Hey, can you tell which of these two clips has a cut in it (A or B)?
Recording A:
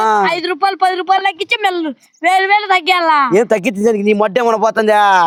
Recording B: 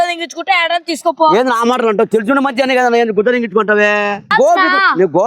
B